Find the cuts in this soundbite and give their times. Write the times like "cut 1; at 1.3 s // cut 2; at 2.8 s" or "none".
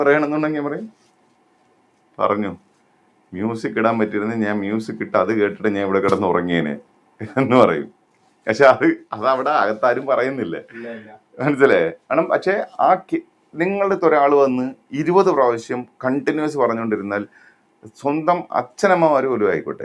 none